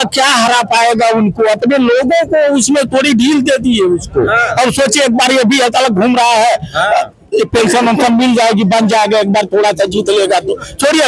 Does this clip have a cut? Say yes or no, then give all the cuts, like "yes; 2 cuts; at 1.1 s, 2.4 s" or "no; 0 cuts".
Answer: no; 0 cuts